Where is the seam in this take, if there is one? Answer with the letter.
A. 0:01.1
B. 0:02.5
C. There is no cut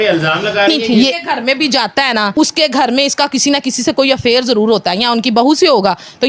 A